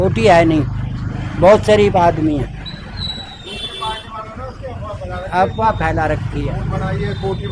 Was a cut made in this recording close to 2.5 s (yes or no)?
no